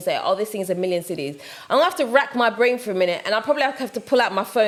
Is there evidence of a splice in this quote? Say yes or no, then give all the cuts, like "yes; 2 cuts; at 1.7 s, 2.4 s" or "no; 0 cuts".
no; 0 cuts